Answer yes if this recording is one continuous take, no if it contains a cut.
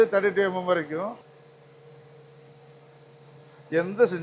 no